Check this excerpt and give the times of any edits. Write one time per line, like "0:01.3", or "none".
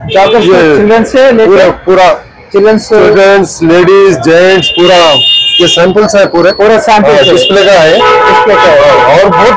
none